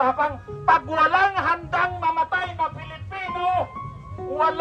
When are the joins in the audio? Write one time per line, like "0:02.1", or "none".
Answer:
none